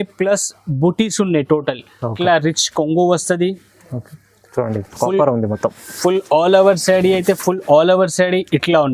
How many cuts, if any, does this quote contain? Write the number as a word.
one